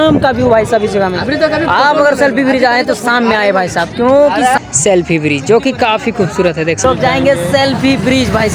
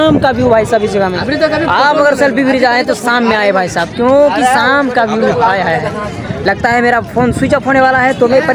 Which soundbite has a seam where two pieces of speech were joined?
first; 2 cuts; at 4.6 s, 6.8 s

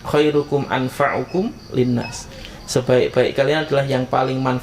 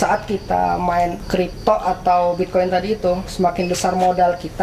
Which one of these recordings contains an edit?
second; 1 cut; at 1.5 s

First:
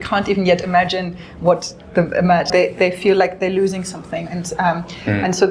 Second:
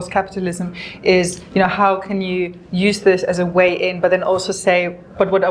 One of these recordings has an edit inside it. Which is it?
first; 1 cut; at 2.5 s

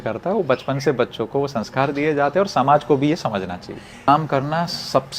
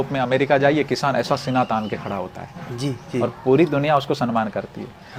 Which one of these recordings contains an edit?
first; 1 cut; at 4.1 s

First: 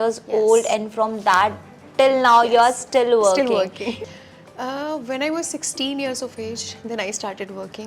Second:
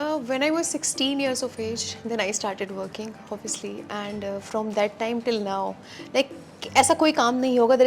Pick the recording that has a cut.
first; 1 cut; at 3.9 s

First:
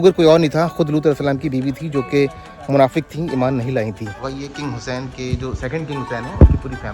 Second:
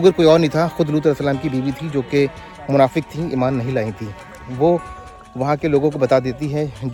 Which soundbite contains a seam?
first; 1 cut; at 4.2 s

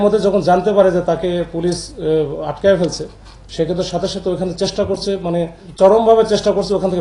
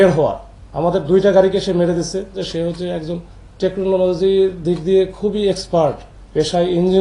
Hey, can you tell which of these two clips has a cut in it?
second; 1 cut; at 2.3 s

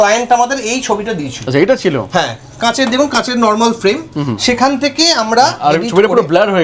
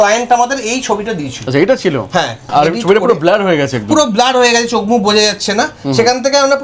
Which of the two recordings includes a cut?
second; 1 cut; at 2.5 s

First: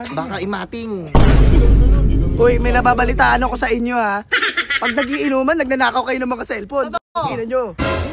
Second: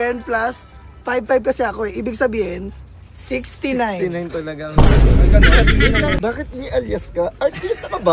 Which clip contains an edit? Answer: second; 1 cut; at 6.2 s

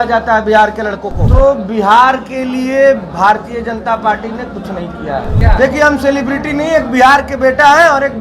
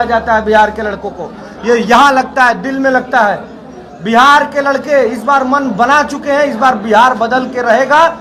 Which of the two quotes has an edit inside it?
first; 2 cuts; at 1.1 s, 5.4 s

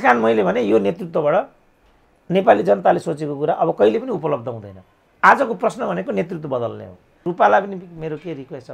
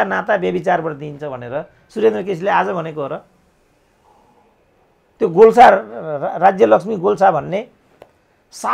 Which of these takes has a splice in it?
first; 1 cut; at 7.2 s

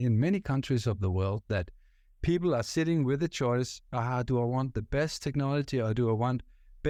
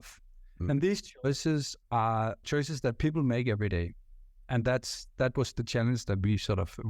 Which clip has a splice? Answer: second; 1 cut; at 2.4 s

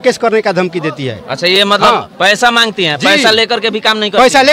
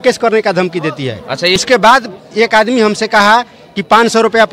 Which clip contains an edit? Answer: second; 1 cut; at 1.6 s

